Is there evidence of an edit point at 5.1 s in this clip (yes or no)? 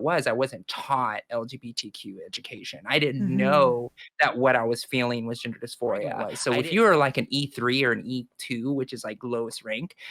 no